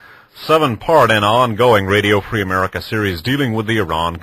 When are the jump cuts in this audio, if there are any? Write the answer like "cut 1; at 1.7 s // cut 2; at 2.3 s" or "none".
none